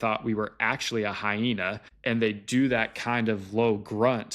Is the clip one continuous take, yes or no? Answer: no